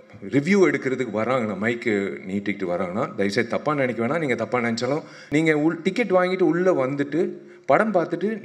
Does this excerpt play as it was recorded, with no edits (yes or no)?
no